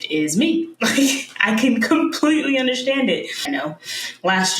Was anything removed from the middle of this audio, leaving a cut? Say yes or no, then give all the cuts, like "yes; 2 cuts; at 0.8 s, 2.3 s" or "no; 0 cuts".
yes; 1 cut; at 3.4 s